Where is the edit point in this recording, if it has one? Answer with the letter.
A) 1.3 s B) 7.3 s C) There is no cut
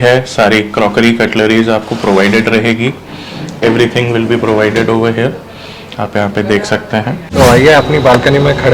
B